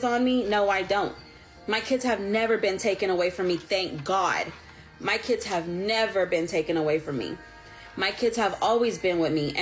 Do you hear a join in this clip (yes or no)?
no